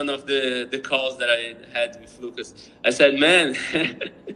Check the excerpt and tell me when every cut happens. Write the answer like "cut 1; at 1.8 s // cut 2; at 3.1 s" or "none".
none